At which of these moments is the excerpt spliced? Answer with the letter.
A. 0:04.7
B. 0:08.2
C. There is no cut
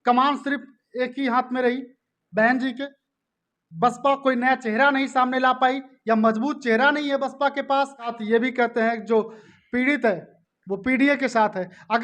B